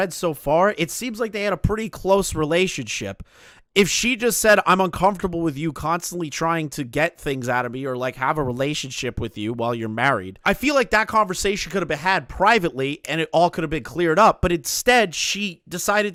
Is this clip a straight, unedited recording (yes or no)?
yes